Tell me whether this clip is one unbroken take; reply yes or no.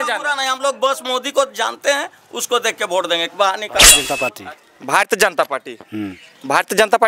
no